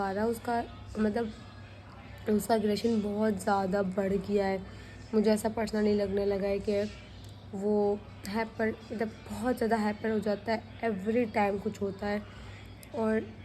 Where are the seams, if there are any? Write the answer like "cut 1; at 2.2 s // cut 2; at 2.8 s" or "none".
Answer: none